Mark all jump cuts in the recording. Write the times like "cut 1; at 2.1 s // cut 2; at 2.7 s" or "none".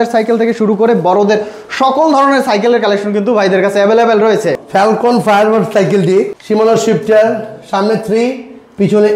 cut 1; at 4.6 s // cut 2; at 6.4 s